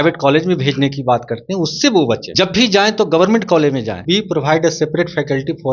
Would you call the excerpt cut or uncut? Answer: cut